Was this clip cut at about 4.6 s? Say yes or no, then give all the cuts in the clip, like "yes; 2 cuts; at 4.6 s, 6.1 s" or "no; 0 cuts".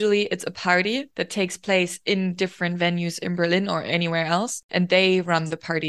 yes; 2 cuts; at 1.2 s, 4.6 s